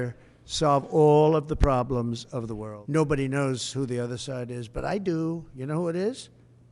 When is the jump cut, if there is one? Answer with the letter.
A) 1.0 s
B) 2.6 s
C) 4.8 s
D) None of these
B